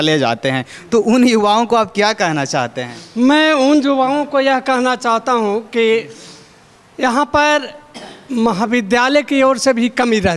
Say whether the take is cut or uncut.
uncut